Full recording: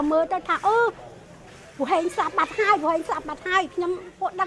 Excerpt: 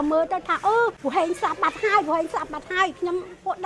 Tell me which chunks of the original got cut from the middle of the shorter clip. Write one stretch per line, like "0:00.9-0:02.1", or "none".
0:01.0-0:01.7